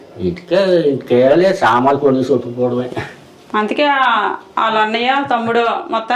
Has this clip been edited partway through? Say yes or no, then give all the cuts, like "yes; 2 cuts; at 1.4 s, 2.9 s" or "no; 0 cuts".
no; 0 cuts